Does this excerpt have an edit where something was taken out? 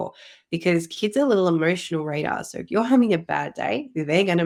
no; 0 cuts

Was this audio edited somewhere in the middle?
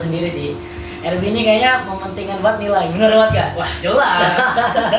no; 0 cuts

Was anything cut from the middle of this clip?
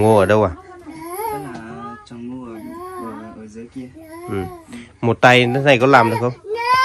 no; 0 cuts

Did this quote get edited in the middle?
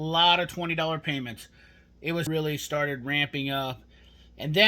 yes; 1 cut; at 2.3 s

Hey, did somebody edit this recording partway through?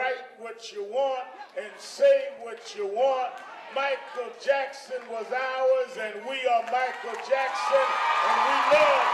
yes; 1 cut; at 4.8 s

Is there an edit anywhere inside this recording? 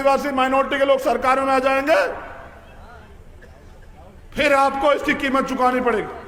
no; 0 cuts

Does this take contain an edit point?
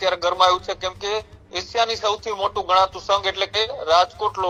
no; 0 cuts

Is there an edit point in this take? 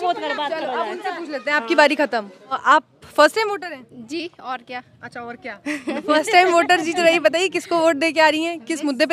yes; 1 cut; at 2.6 s

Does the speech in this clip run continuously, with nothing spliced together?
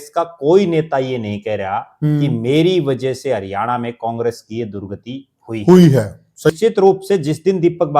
no; 1 cut; at 6.5 s

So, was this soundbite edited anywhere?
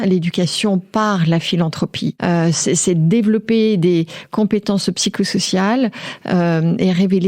no; 0 cuts

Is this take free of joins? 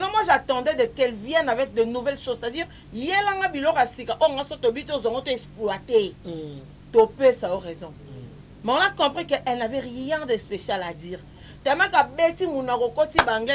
no; 1 cut; at 0.9 s

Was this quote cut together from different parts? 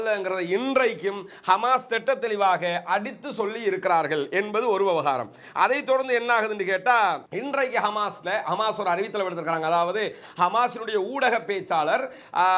no; 0 cuts

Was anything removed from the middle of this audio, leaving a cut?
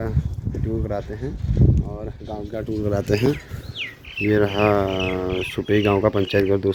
no; 0 cuts

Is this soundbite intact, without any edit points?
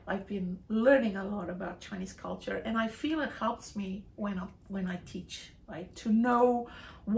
yes; 0 cuts

